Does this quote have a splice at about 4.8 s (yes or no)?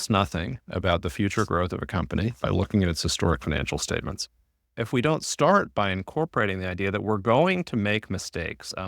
yes